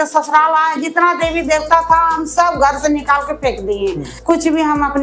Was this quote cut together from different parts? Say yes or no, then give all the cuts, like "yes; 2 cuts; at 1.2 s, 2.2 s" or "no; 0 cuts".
yes; 1 cut; at 4.1 s